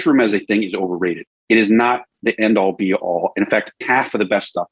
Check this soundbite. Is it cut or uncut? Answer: cut